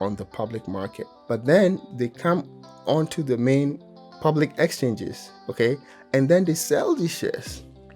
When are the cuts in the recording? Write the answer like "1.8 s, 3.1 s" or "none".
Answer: 1.1 s, 1.9 s, 3.8 s